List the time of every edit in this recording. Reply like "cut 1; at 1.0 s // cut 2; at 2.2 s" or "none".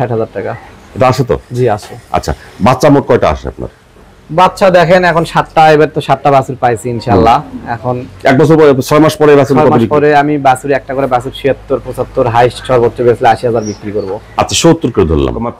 none

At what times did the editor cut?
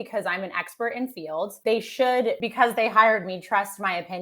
cut 1; at 1.6 s // cut 2; at 2.4 s

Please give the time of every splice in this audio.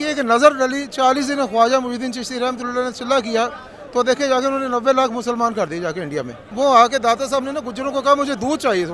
cut 1; at 6.4 s

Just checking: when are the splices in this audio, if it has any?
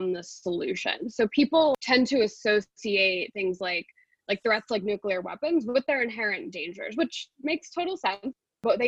cut 1; at 1.8 s

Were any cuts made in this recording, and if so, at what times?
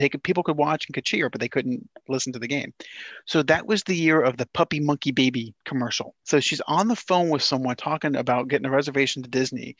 none

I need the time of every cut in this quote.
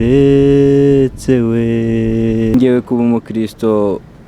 cut 1; at 2.5 s

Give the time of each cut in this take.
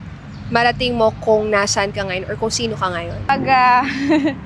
cut 1; at 3.3 s

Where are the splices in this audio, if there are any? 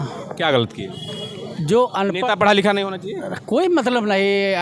none

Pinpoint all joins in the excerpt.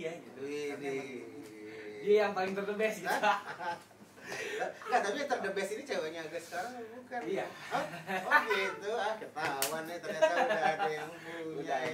none

